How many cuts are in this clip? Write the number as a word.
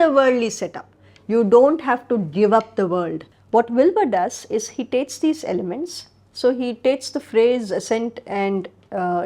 one